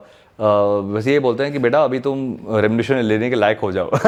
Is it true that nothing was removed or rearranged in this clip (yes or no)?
yes